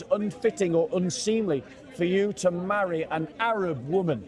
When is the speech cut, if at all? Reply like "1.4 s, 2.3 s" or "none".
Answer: 3.3 s